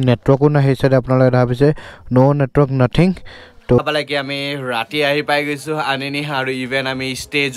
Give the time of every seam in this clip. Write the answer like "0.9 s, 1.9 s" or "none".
3.8 s